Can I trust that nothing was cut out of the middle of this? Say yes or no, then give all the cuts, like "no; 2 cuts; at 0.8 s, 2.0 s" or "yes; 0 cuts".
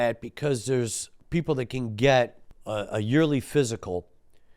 no; 1 cut; at 1.1 s